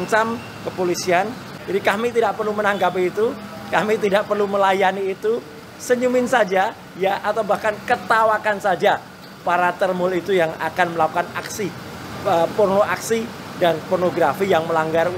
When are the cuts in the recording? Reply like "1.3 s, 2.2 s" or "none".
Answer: none